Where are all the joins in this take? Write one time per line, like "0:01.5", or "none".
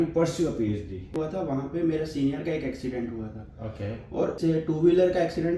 0:01.1
0:04.4